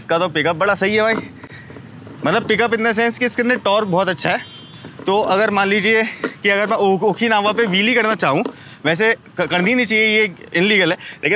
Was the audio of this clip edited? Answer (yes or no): no